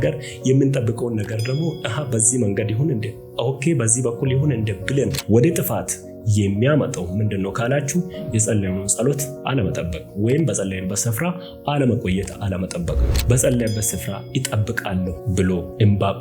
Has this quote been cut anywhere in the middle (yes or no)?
yes